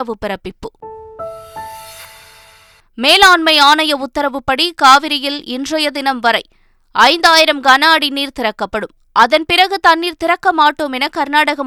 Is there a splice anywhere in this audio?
no; 0 cuts

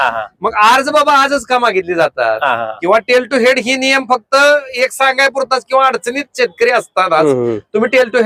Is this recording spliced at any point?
no; 0 cuts

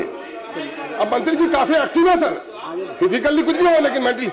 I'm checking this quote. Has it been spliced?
no; 0 cuts

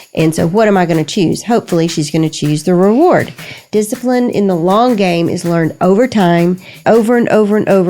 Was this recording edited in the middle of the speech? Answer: yes; 2 cuts; at 3.6 s, 6.7 s

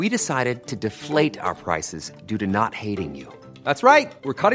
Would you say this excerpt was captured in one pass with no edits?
yes; 0 cuts

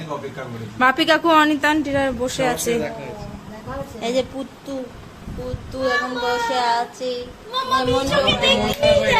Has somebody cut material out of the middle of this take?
no; 0 cuts

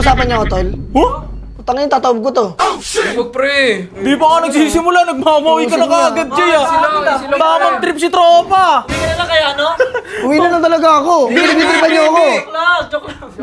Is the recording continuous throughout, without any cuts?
yes; 0 cuts

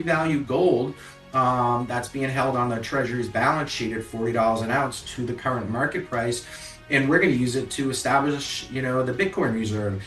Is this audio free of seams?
yes; 0 cuts

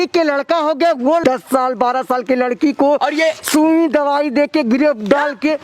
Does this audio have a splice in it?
yes; 1 cut; at 1.2 s

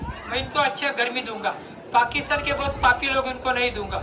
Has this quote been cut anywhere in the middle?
no; 0 cuts

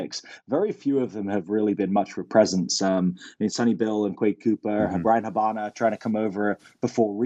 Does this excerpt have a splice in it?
no; 0 cuts

